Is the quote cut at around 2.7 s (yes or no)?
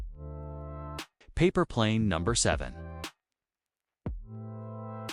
yes